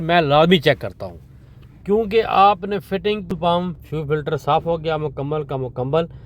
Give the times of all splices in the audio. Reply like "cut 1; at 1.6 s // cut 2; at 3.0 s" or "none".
cut 1; at 3.4 s